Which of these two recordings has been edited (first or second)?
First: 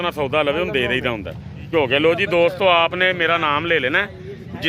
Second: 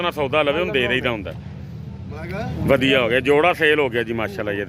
first